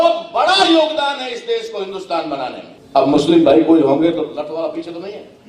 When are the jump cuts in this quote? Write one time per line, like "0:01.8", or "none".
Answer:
0:02.7